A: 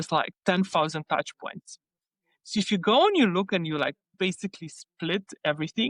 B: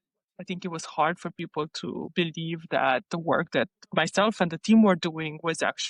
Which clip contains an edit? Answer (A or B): B